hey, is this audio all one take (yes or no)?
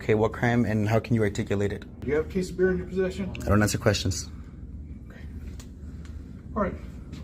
no